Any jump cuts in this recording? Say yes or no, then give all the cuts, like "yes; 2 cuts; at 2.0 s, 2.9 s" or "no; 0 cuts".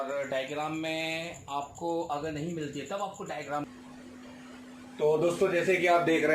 yes; 1 cut; at 3.7 s